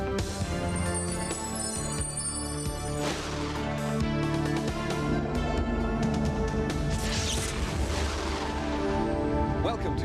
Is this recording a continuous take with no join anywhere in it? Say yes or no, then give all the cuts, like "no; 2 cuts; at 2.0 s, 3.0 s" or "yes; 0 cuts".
yes; 0 cuts